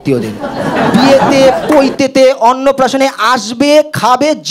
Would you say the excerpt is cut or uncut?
uncut